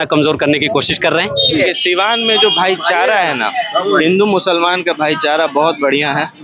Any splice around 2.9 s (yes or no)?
no